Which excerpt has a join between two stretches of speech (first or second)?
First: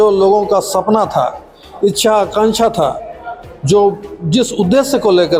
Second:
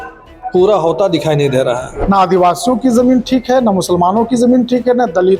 second